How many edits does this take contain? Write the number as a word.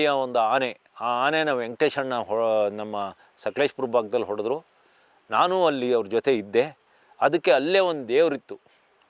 zero